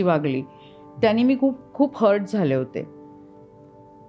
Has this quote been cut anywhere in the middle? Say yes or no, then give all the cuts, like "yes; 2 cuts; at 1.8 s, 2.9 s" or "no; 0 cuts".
no; 0 cuts